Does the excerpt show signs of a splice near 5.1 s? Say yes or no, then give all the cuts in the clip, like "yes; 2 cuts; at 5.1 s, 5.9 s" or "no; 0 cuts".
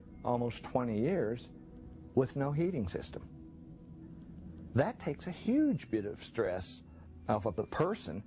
yes; 1 cut; at 5.1 s